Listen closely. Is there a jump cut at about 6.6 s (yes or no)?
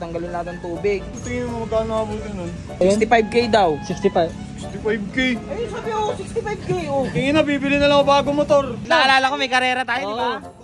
no